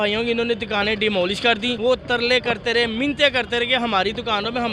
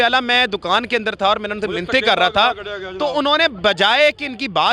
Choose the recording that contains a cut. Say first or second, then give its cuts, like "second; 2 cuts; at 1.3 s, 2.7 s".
first; 1 cut; at 1.8 s